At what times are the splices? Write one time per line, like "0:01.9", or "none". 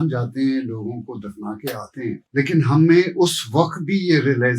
0:02.2